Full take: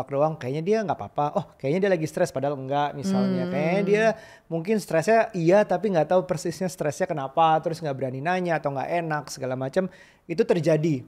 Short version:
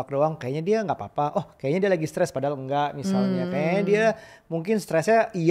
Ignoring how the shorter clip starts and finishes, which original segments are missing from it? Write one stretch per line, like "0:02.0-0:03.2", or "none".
none